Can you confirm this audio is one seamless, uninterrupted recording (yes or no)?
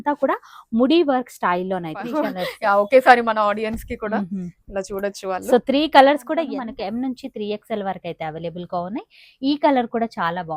no